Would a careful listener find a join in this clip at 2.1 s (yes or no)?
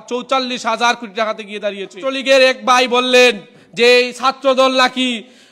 yes